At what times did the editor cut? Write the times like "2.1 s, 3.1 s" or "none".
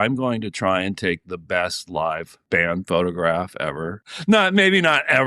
2.3 s, 4.0 s

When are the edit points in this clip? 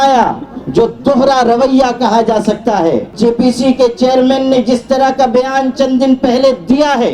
3.1 s

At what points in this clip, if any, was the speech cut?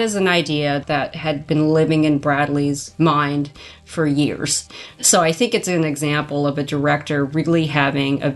0.8 s, 2.9 s, 4.7 s

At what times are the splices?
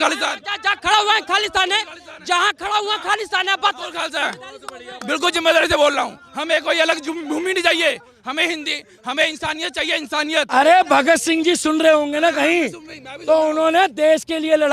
10.4 s

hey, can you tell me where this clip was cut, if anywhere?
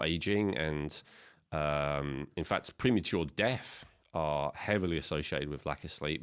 none

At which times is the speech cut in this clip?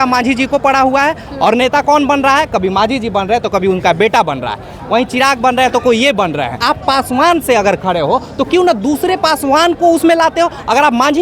6.6 s

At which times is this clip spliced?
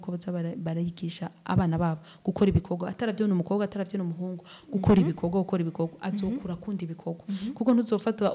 none

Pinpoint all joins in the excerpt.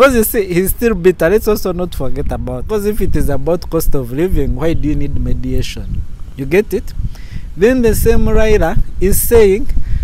2.6 s

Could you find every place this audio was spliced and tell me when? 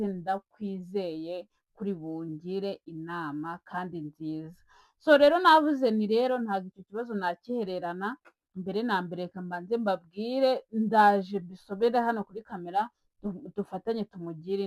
none

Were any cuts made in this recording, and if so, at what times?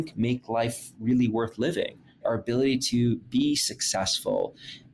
2.2 s, 3.3 s

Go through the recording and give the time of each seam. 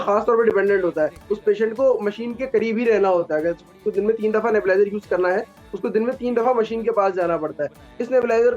none

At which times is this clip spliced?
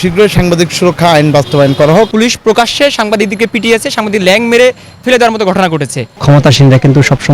2.1 s, 6.0 s

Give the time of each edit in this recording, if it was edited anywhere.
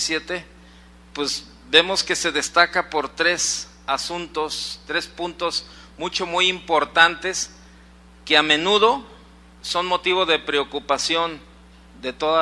7.7 s

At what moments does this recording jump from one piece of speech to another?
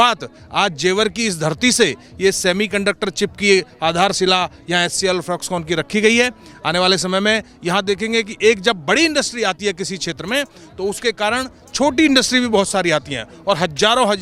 none

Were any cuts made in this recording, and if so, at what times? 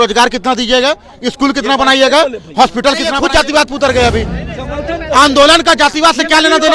3.1 s

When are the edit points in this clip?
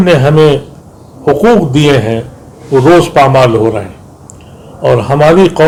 none

